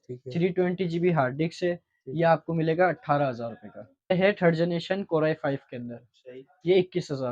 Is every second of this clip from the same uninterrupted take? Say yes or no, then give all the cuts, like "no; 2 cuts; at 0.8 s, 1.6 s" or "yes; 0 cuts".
no; 1 cut; at 4.1 s